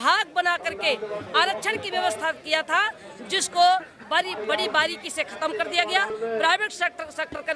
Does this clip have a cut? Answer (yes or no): no